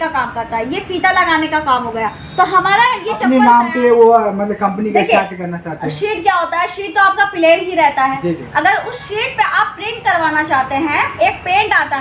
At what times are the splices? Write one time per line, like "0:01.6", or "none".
0:03.3